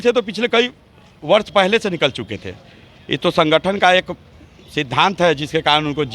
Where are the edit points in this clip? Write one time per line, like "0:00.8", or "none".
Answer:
none